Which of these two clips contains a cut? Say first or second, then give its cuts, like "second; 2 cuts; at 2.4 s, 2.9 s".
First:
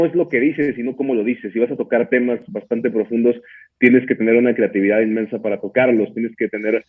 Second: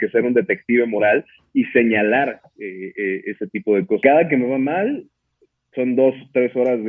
second; 1 cut; at 4.0 s